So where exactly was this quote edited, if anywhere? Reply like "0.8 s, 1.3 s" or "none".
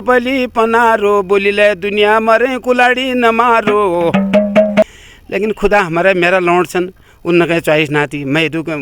4.8 s